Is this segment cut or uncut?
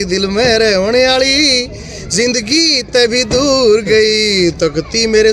uncut